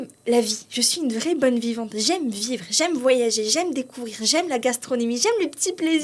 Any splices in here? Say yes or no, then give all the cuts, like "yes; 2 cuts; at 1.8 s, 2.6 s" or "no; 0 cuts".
no; 0 cuts